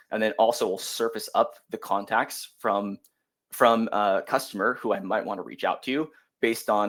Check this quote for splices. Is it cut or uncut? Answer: uncut